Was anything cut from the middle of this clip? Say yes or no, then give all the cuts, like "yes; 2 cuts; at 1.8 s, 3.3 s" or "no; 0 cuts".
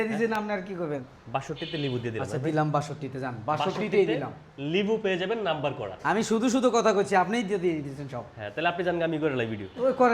yes; 1 cut; at 1.1 s